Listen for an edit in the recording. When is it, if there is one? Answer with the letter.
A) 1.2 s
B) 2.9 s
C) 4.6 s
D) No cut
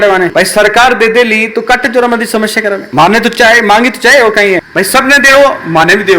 C